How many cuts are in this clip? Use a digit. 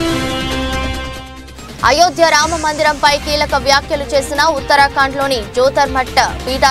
1